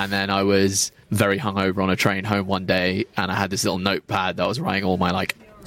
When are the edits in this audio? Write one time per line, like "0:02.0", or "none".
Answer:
0:01.0